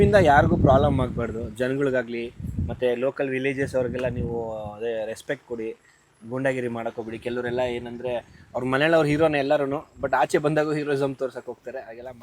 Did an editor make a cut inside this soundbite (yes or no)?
no